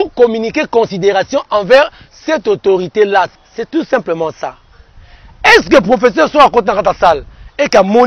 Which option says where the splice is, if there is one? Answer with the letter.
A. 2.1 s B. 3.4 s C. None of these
B